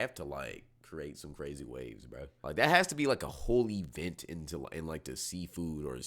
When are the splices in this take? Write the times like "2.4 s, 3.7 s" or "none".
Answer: 2.3 s